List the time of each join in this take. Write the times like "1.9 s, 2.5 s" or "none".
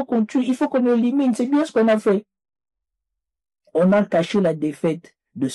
3.0 s